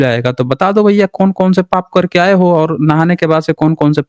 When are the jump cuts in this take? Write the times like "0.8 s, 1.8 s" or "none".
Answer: none